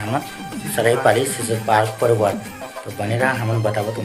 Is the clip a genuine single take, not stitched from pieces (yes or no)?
yes